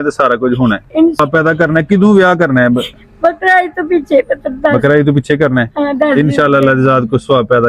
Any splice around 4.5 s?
no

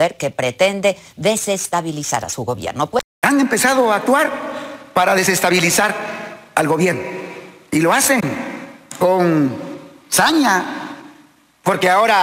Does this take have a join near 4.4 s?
no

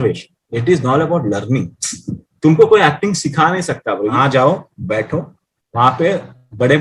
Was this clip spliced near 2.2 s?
no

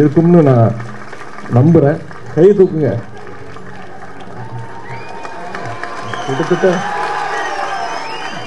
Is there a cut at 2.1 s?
yes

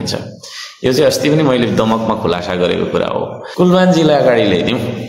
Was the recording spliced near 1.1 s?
no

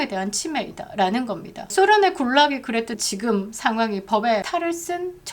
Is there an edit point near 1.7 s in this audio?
yes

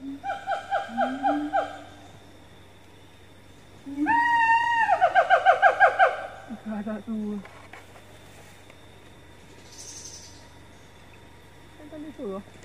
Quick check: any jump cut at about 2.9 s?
no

